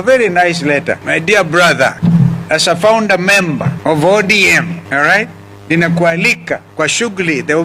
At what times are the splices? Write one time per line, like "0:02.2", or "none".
0:01.0
0:02.0
0:03.7
0:04.8
0:06.7